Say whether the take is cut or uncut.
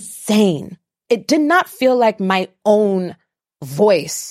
cut